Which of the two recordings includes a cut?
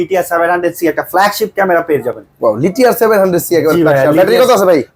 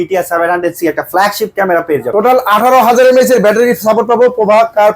second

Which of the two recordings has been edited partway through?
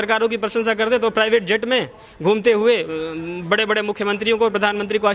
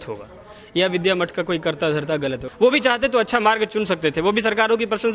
second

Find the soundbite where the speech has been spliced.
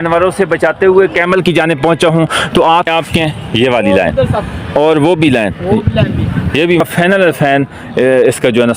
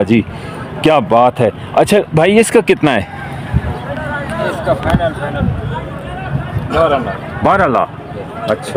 first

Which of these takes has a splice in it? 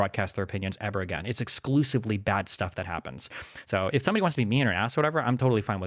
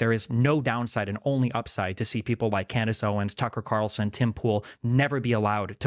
first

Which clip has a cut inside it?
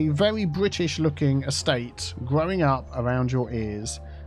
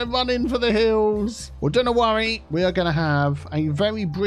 second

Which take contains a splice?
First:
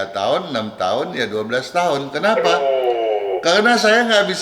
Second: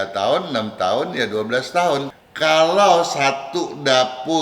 second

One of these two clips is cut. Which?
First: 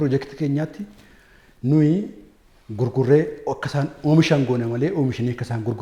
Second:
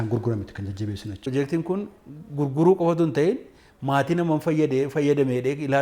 second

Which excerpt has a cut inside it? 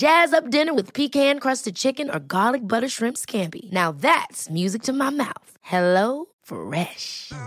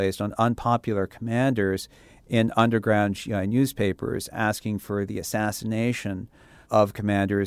second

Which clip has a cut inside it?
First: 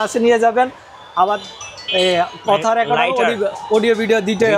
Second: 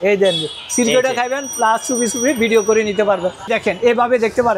second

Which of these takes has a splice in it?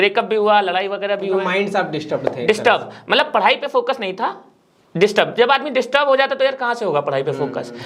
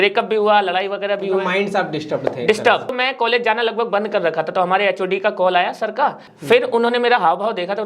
second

